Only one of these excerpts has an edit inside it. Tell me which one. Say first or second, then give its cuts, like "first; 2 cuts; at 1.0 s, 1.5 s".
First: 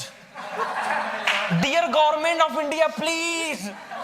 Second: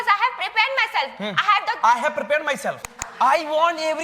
second; 1 cut; at 2.9 s